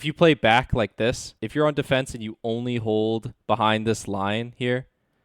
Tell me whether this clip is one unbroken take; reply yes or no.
no